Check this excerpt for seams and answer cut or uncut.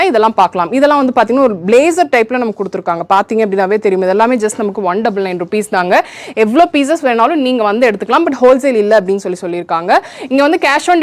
uncut